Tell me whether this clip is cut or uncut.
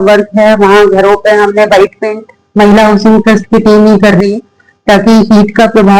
uncut